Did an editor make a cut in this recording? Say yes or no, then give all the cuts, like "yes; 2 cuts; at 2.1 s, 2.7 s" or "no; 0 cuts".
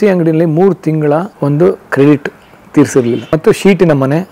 yes; 1 cut; at 1.3 s